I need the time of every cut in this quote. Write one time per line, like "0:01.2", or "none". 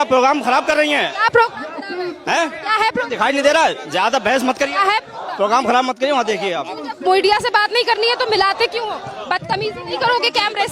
none